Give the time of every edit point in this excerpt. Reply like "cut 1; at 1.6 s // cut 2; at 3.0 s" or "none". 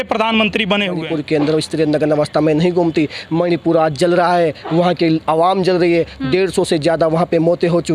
cut 1; at 1.0 s